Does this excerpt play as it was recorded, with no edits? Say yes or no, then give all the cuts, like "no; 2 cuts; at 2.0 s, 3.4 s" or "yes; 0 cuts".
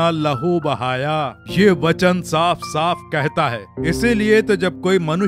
no; 1 cut; at 3.7 s